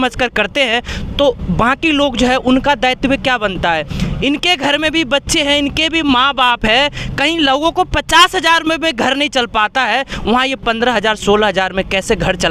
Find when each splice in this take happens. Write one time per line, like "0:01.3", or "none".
none